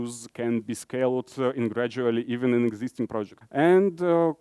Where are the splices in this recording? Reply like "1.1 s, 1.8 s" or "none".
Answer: 3.4 s